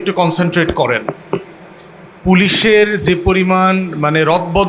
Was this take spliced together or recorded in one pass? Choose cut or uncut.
uncut